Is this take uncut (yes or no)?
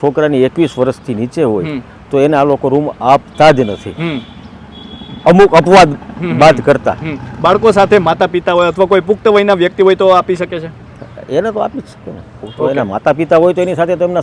yes